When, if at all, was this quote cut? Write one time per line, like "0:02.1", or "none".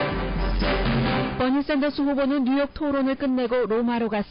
0:02.9